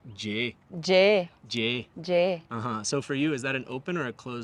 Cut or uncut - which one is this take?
uncut